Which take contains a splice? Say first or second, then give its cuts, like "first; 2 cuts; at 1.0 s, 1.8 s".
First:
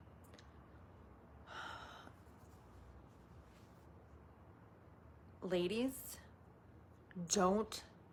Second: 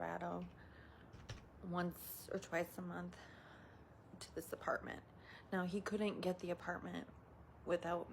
second; 1 cut; at 6.2 s